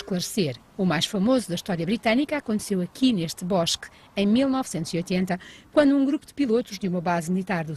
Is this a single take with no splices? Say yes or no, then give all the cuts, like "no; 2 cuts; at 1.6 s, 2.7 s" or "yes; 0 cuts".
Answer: yes; 0 cuts